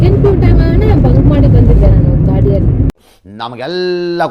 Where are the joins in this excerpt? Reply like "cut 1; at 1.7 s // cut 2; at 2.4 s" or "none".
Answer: cut 1; at 2.9 s